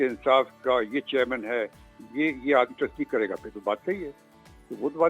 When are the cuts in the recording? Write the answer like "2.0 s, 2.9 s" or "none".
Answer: none